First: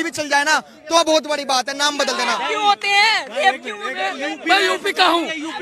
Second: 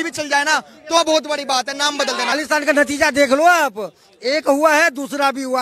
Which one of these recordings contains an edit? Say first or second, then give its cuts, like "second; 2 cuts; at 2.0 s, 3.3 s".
second; 1 cut; at 2.3 s